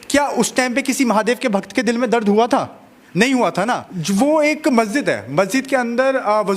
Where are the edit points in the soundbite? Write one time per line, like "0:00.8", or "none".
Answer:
0:03.9